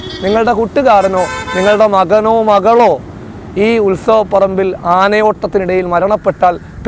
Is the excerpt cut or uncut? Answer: uncut